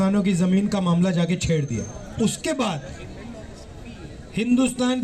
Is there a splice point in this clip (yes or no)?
yes